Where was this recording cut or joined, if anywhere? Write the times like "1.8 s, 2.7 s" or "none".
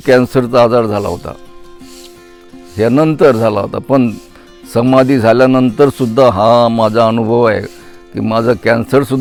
none